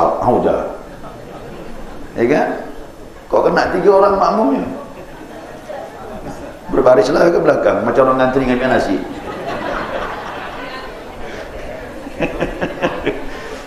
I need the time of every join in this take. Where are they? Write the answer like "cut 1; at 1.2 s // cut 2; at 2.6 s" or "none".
none